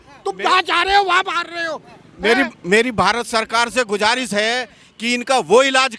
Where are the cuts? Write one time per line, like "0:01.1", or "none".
none